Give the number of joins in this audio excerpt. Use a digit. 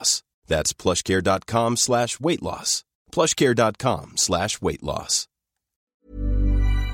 1